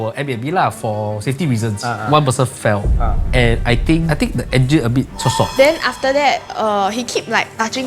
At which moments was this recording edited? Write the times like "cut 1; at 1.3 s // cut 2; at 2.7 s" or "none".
cut 1; at 4.1 s // cut 2; at 5.5 s